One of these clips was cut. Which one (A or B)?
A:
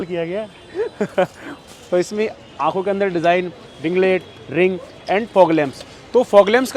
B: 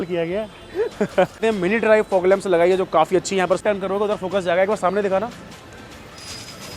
B